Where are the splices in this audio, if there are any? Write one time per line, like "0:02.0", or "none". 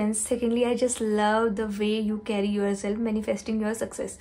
none